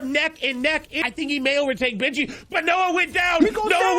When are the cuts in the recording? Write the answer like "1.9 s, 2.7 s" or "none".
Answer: 0.9 s